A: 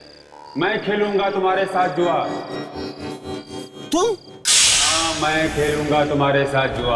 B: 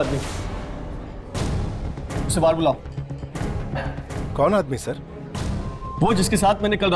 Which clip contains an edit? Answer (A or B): A